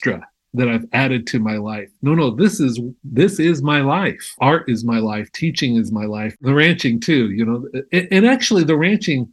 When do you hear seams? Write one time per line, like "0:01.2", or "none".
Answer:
0:04.4
0:06.4